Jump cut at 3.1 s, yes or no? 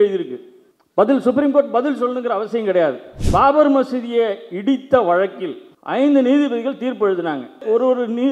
yes